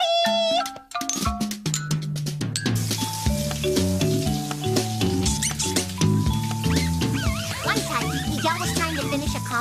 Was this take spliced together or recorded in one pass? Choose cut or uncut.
cut